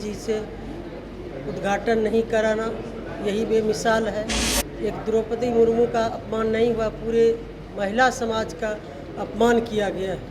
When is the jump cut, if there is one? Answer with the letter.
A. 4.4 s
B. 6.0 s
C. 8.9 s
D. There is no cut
A